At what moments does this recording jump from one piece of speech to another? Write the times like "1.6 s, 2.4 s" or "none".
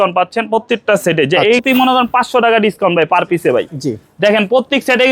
1.6 s